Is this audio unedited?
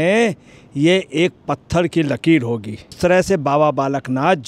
no; 1 cut; at 3.0 s

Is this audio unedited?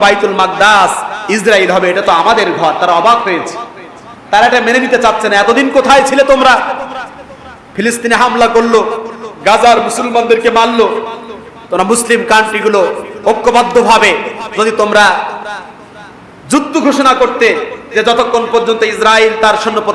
yes; 0 cuts

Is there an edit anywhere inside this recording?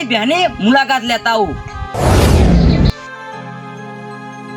yes; 1 cut; at 1.9 s

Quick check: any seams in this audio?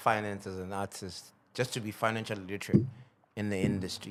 no; 0 cuts

